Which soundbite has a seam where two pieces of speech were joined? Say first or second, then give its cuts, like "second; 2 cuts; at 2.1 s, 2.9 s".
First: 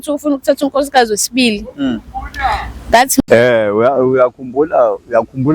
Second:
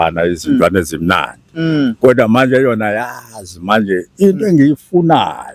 first; 1 cut; at 3.2 s